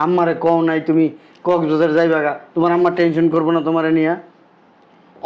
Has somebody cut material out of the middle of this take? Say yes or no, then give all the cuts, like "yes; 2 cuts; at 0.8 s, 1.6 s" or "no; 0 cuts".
no; 0 cuts